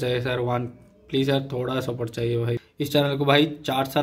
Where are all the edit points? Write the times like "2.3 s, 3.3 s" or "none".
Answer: 2.7 s